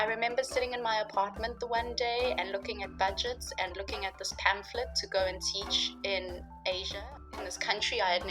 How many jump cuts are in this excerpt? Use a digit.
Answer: 0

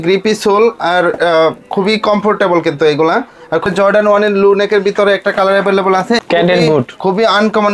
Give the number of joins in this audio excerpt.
2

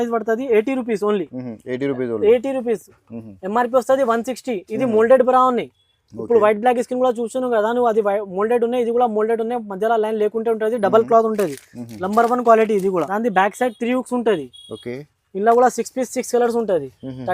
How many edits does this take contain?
1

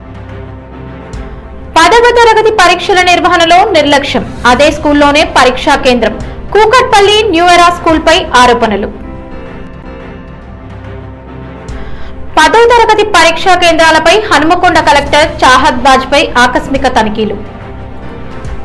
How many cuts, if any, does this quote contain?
0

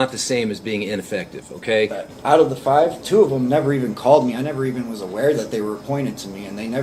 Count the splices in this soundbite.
1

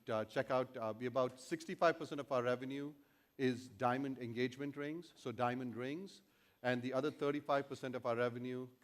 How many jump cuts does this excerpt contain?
1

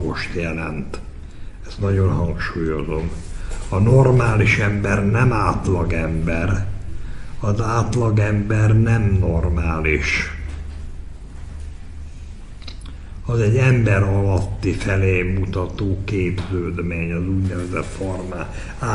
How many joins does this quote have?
0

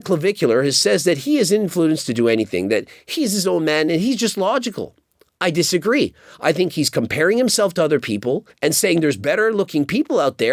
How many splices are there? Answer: 0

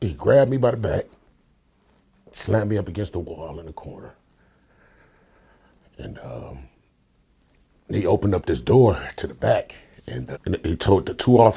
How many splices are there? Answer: 1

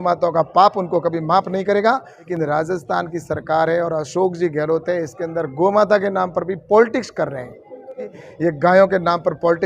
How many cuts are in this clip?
2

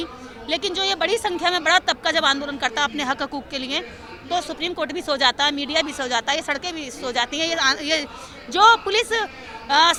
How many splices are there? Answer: 0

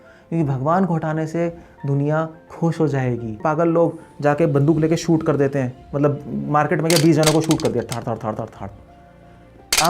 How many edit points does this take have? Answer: 1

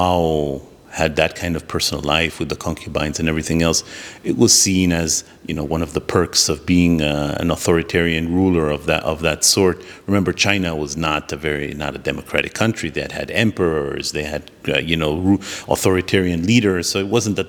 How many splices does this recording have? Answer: 0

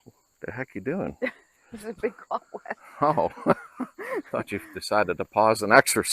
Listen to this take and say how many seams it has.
1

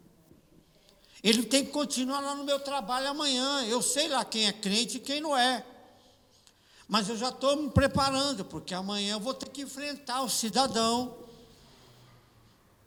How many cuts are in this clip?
0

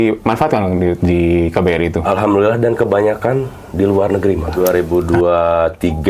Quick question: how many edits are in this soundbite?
1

